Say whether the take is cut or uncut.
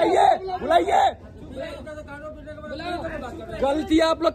uncut